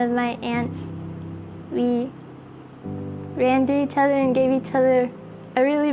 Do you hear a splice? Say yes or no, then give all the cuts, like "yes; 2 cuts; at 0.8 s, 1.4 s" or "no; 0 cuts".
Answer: no; 0 cuts